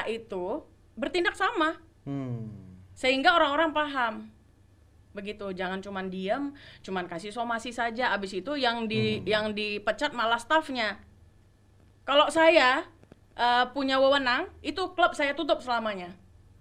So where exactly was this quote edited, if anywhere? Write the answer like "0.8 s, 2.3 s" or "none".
none